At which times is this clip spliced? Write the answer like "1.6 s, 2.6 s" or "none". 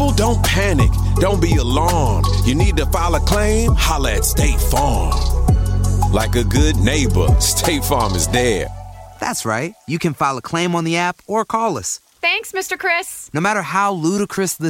none